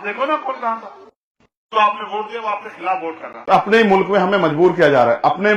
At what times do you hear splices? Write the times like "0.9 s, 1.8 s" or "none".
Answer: 3.4 s